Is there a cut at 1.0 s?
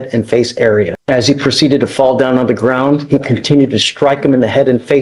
yes; 1 cut; at 1.0 s

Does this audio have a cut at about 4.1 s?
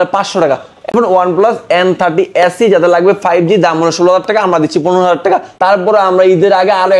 no; 2 cuts; at 0.9 s, 5.5 s

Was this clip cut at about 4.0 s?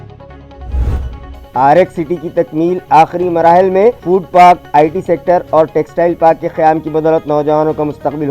no; 1 cut; at 1.2 s

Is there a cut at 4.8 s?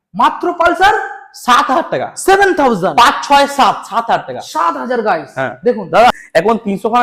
no; 1 cut; at 6.1 s

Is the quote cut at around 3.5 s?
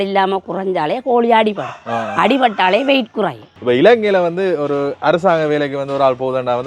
yes; 1 cut; at 3.5 s

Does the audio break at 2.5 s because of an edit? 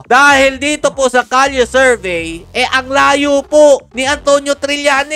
yes; 1 cut; at 2.5 s

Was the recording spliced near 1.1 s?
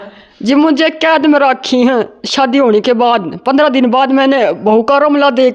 no; 0 cuts

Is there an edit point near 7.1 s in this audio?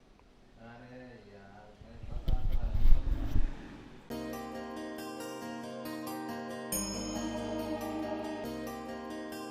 no; 1 cut; at 8.4 s

